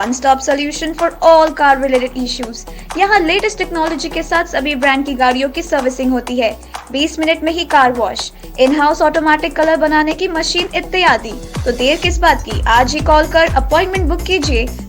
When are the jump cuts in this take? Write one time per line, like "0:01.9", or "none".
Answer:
none

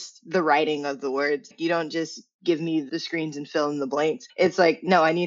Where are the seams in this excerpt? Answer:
0:01.5
0:04.2

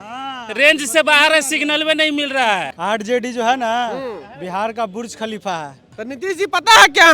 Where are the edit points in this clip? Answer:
0:02.7
0:05.9

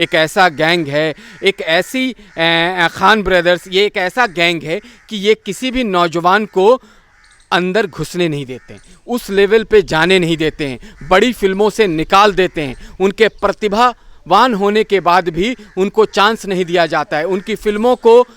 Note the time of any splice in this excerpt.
none

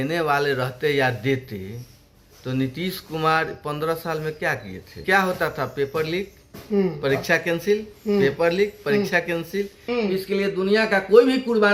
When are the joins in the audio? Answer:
0:05.0
0:09.8

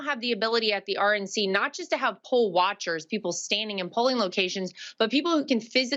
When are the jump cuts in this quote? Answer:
none

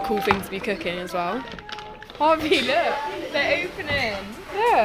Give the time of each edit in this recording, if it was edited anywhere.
0:02.1

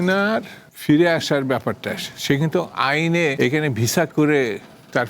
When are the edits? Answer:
0:03.3

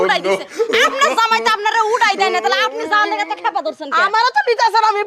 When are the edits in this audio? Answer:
none

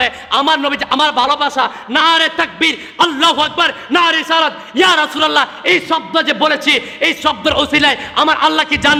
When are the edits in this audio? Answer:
none

